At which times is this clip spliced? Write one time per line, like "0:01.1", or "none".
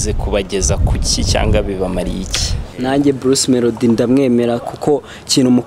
0:02.6